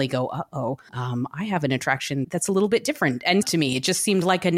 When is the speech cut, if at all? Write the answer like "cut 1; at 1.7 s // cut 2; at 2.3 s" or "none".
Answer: cut 1; at 0.9 s // cut 2; at 2.2 s // cut 3; at 3.4 s